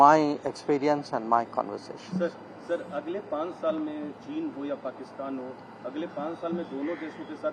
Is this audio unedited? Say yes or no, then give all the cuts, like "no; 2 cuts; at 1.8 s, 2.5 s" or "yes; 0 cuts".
yes; 0 cuts